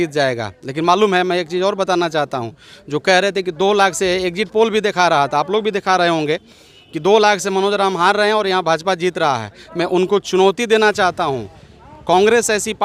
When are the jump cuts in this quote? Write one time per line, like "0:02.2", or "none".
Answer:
none